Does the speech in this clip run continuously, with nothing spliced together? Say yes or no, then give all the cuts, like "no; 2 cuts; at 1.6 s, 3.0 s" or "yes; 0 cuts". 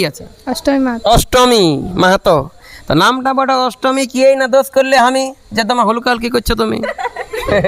yes; 0 cuts